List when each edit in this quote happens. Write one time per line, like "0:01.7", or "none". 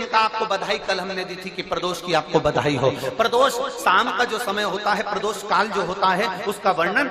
0:02.9